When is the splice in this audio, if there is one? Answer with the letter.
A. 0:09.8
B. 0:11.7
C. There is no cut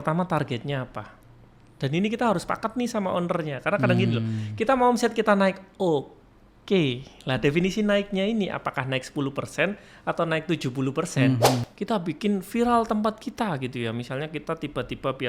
B